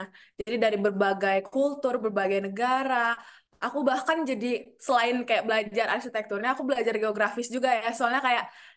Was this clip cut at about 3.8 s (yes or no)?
no